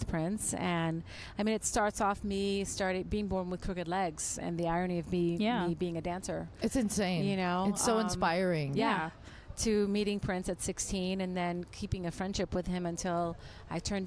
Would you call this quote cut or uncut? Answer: uncut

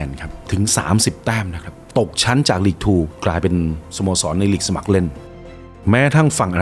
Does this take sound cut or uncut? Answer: cut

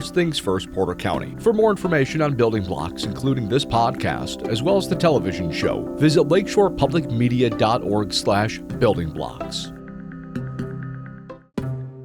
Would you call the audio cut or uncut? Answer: cut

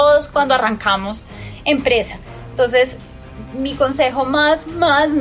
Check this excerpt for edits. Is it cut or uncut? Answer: uncut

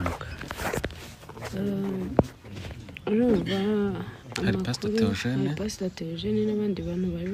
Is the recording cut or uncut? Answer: uncut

